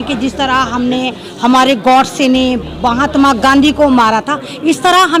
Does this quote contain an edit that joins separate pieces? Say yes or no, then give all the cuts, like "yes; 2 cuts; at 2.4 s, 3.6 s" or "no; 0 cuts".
no; 0 cuts